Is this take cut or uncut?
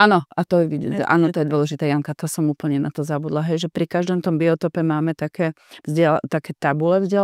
uncut